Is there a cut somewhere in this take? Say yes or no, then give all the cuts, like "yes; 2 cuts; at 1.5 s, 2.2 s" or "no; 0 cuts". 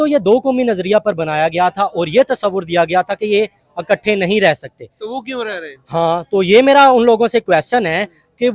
no; 0 cuts